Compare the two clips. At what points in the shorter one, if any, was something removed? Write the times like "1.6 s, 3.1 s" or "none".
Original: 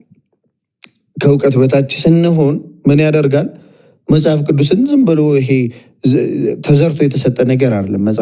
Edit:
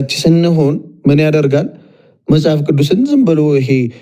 none